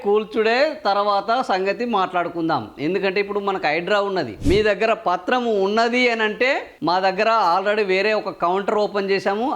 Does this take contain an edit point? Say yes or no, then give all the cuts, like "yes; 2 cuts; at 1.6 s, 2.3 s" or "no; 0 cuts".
yes; 1 cut; at 4.3 s